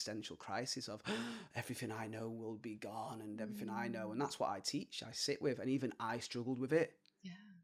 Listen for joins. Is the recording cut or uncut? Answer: uncut